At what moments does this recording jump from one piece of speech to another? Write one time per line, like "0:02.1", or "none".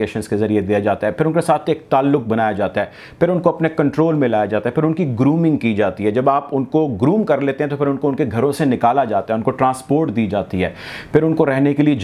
none